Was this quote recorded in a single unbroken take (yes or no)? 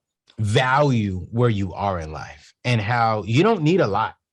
yes